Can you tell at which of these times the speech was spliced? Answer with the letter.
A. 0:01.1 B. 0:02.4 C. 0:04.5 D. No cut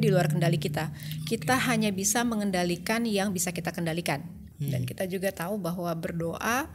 C